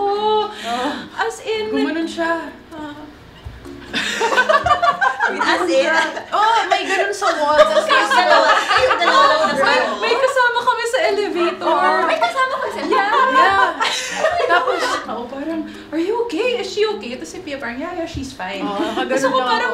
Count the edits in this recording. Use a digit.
1